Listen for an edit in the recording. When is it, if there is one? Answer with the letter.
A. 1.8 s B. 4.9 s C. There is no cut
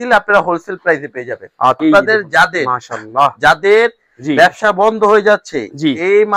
A